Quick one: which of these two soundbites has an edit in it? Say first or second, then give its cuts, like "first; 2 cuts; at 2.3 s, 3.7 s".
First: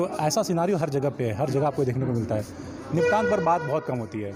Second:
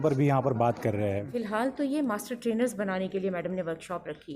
second; 1 cut; at 1.3 s